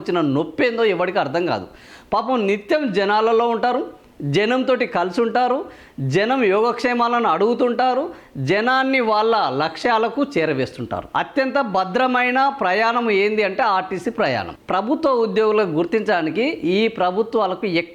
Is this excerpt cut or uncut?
uncut